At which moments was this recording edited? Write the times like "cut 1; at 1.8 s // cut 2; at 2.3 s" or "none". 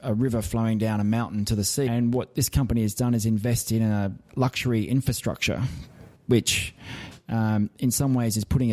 cut 1; at 1.9 s // cut 2; at 4.2 s

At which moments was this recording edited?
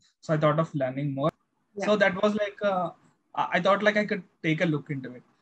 cut 1; at 1.4 s

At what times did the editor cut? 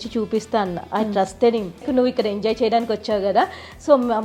cut 1; at 1.8 s

